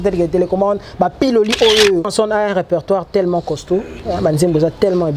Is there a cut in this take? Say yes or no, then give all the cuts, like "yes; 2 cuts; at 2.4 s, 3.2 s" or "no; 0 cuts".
yes; 1 cut; at 2.1 s